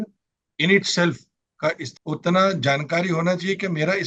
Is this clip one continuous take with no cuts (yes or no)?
no